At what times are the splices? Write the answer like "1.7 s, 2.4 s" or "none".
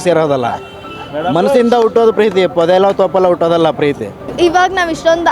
4.2 s